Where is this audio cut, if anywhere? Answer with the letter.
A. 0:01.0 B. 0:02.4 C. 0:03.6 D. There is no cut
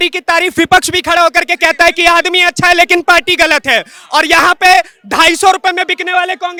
D